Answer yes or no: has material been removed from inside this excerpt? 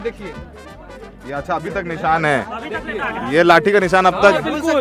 no